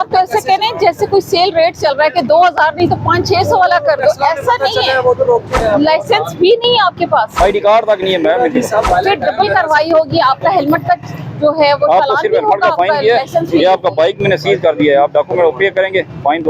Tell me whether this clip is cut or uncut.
cut